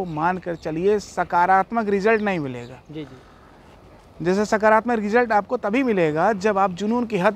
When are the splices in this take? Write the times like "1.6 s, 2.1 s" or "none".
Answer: none

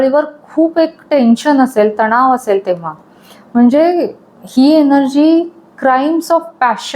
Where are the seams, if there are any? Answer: none

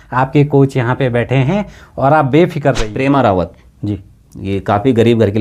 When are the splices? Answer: 2.9 s

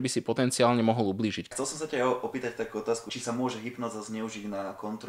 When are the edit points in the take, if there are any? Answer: 1.4 s

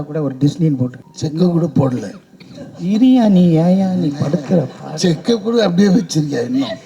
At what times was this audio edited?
1.1 s

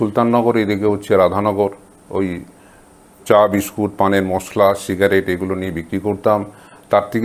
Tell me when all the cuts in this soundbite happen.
none

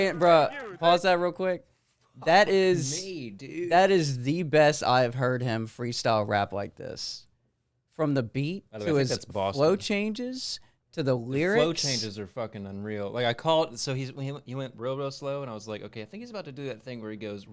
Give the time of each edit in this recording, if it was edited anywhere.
none

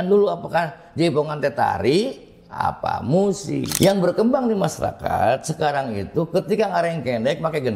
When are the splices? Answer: 3.7 s

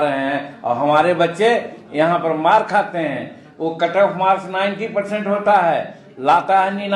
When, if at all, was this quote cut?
none

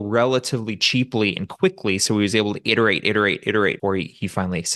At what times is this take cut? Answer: 3.8 s

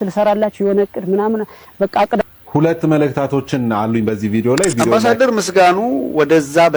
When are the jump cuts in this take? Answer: 4.8 s

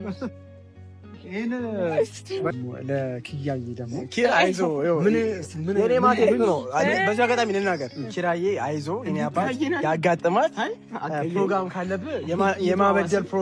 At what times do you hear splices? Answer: 2.5 s

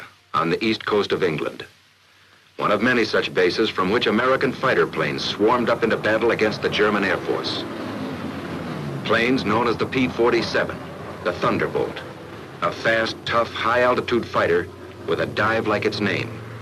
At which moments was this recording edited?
3.9 s

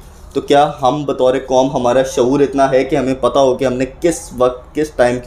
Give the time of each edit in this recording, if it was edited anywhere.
none

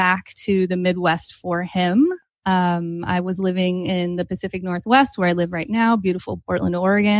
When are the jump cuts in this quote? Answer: none

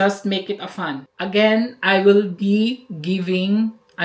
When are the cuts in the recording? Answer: 1.1 s

